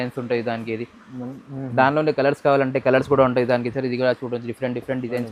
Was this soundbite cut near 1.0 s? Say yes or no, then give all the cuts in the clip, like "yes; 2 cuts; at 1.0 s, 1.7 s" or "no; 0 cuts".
no; 0 cuts